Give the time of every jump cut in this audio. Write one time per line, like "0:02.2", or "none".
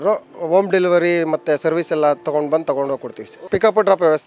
0:03.3